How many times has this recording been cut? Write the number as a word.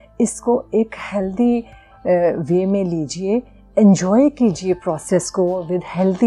zero